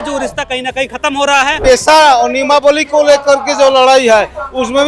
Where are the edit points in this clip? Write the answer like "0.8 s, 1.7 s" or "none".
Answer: 1.6 s